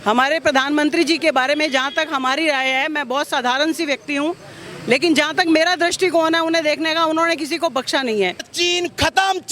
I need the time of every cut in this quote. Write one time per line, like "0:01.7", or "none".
0:08.5